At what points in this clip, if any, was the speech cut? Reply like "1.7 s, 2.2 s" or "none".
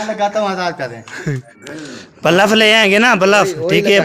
1.5 s